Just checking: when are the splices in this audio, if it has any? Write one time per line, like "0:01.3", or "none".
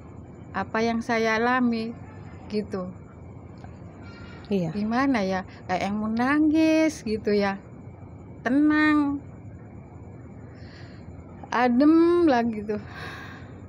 none